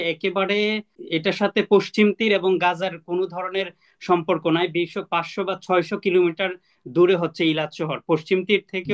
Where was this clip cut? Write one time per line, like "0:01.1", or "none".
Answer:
0:01.0